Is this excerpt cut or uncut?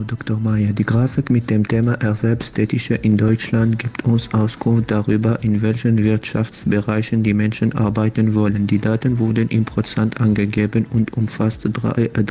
uncut